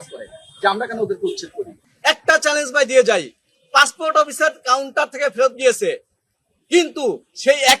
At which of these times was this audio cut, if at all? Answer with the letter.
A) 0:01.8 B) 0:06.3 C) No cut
A